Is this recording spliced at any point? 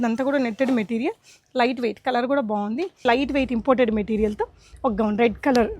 yes; 1 cut; at 3.0 s

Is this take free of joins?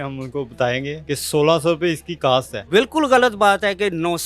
no; 2 cuts; at 1.0 s, 2.7 s

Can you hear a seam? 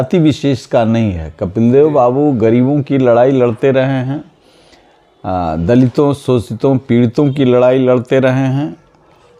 no; 0 cuts

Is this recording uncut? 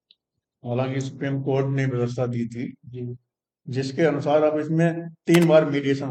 yes; 0 cuts

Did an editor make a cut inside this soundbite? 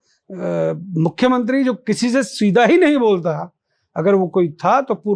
no; 0 cuts

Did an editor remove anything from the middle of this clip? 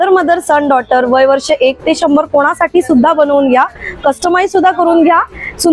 no; 0 cuts

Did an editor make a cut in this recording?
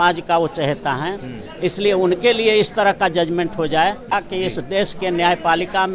yes; 1 cut; at 4.1 s

